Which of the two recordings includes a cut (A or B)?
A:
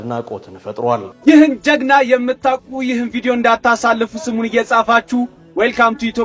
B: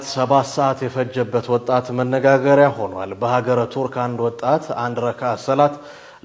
A